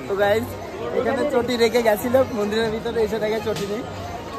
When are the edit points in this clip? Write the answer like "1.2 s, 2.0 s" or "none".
none